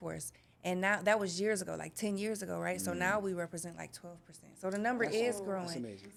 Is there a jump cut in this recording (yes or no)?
no